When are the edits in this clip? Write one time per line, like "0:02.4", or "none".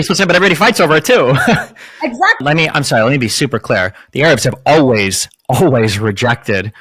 0:02.4